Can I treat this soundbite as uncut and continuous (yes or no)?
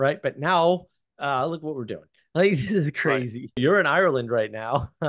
no